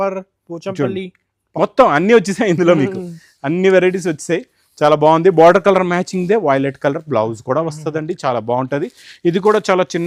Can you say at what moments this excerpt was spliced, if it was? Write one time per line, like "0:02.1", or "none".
none